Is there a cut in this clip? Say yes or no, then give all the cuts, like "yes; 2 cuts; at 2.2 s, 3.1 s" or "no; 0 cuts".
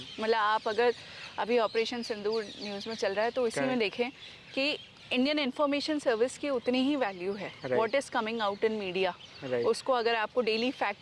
no; 0 cuts